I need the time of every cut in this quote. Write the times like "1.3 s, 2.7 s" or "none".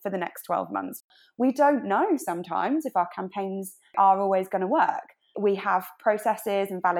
1.2 s, 3.9 s, 5.3 s